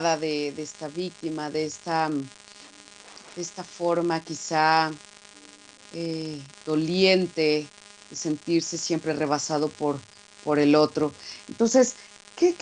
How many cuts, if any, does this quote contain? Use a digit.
1